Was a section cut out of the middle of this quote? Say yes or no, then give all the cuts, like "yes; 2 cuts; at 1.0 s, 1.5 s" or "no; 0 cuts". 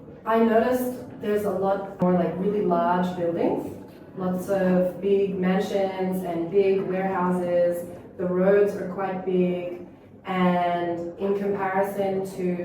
yes; 1 cut; at 2.0 s